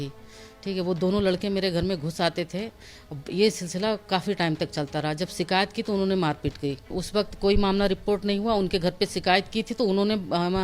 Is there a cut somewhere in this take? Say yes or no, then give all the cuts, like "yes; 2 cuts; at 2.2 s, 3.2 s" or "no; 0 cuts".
yes; 1 cut; at 7.0 s